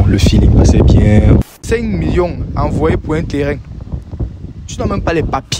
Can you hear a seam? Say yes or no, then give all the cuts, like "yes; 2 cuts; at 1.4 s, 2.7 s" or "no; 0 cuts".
yes; 1 cut; at 1.4 s